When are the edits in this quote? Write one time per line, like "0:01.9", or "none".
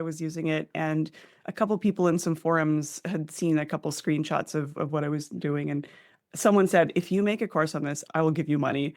0:08.0